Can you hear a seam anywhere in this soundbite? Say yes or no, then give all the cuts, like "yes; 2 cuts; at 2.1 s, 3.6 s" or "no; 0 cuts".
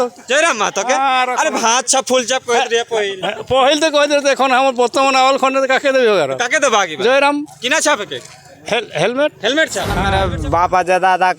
yes; 1 cut; at 10.0 s